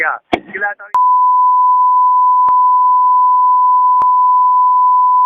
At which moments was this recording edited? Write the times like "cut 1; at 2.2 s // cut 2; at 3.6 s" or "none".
none